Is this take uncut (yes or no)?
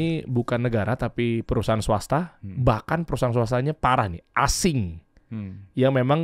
yes